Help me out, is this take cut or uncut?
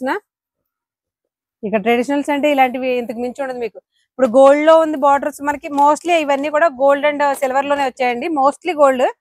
uncut